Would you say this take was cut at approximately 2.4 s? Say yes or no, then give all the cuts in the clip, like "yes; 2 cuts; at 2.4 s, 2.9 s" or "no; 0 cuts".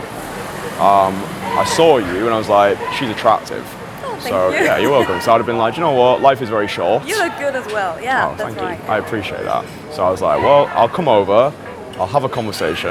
no; 0 cuts